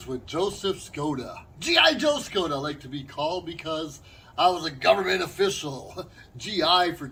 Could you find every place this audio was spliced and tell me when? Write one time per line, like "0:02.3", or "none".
none